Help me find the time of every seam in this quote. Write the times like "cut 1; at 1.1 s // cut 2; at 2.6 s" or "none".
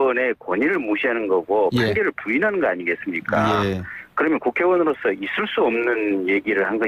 cut 1; at 3.4 s